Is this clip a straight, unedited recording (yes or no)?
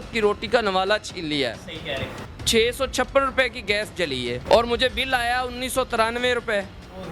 no